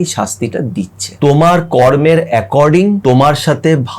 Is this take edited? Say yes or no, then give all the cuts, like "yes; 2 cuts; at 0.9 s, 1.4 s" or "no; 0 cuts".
yes; 2 cuts; at 1.0 s, 3.0 s